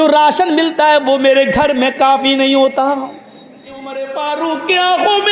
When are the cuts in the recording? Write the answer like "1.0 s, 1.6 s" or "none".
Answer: 4.0 s